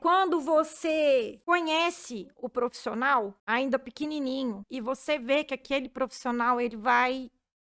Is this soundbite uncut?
no; 3 cuts; at 1.4 s, 3.4 s, 4.7 s

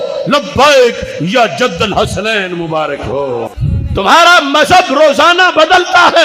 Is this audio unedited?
no; 1 cut; at 3.6 s

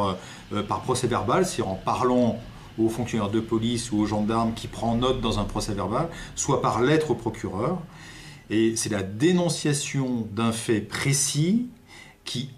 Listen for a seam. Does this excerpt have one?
no; 0 cuts

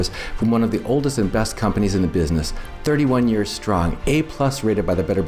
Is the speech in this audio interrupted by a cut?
no; 0 cuts

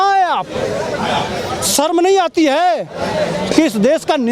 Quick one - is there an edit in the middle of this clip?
no; 0 cuts

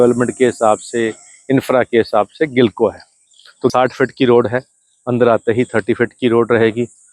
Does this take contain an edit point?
yes; 1 cut; at 3.7 s

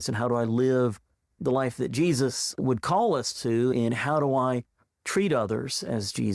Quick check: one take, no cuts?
yes; 0 cuts

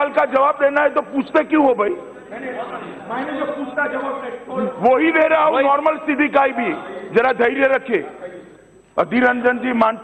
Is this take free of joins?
yes; 0 cuts

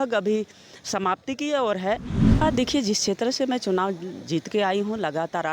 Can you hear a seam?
yes; 1 cut; at 2.2 s

